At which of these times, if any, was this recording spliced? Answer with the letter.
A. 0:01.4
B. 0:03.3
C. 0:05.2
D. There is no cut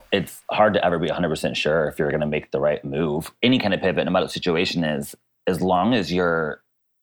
B